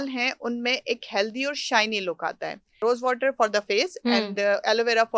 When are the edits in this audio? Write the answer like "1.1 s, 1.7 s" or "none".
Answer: 2.6 s